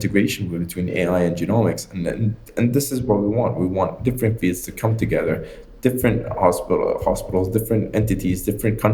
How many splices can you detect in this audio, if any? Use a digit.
0